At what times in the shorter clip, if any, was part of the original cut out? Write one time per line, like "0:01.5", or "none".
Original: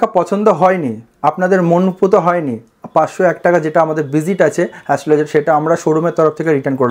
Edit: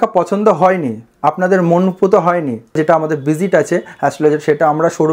0:02.8